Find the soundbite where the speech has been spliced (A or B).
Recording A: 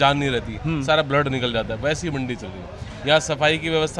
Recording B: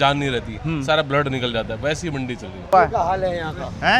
B